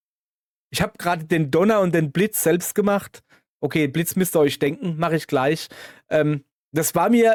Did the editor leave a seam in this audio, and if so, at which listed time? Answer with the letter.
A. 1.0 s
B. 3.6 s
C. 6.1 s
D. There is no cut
D